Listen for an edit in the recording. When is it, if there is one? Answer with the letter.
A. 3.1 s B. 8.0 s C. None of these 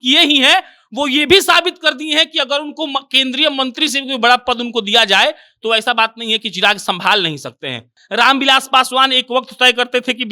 B